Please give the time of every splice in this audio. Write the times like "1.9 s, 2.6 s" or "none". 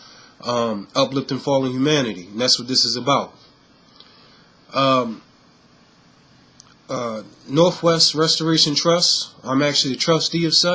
8.4 s